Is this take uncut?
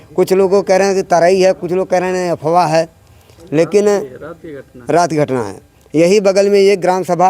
yes; 0 cuts

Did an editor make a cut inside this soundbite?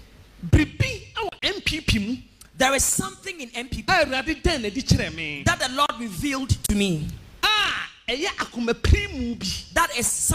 no; 0 cuts

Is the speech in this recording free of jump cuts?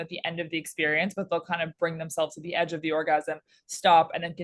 yes; 0 cuts

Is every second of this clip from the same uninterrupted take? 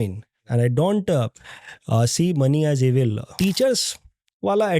no; 1 cut; at 3.2 s

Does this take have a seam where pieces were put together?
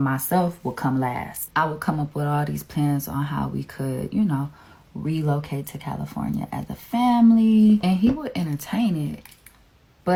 no; 0 cuts

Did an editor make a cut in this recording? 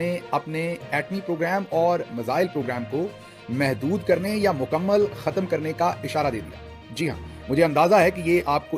no; 0 cuts

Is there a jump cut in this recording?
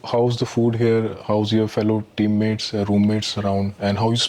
no; 0 cuts

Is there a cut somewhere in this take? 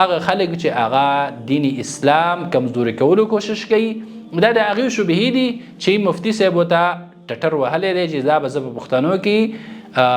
no; 0 cuts

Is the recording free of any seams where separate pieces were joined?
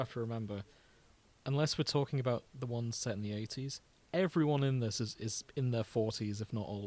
yes; 0 cuts

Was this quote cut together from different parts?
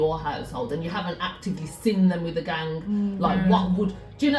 no; 0 cuts

